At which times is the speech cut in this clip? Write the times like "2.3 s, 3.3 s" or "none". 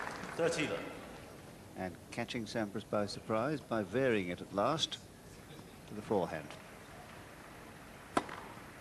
1.1 s